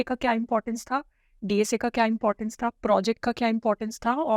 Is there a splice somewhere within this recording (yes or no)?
no